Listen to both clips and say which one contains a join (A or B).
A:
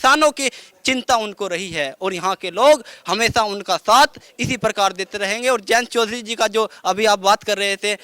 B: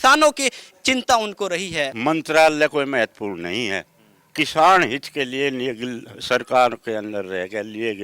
B